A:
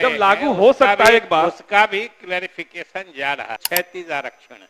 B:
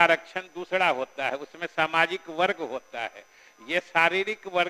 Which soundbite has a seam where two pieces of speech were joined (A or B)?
A